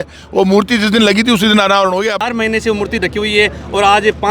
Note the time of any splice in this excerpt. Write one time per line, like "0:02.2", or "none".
0:02.2